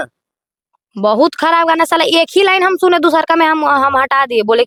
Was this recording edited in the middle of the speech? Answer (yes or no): no